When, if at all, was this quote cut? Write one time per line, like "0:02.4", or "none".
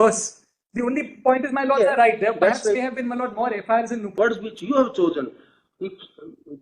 0:04.2